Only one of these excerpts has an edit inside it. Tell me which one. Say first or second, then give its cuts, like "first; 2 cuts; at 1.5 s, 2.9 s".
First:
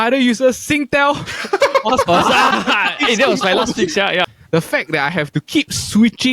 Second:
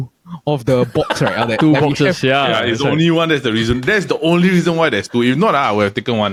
first; 2 cuts; at 2.5 s, 4.2 s